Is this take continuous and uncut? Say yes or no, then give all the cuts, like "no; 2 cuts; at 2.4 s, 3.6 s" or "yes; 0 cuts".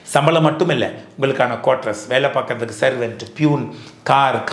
yes; 0 cuts